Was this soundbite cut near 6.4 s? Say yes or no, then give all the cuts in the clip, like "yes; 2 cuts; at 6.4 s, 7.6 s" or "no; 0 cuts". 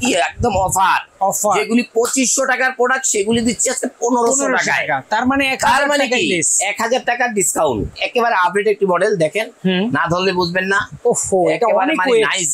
no; 1 cut; at 7.9 s